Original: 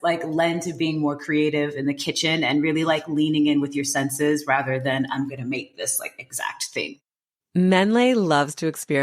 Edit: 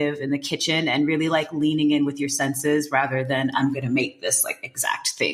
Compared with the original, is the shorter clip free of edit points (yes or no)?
yes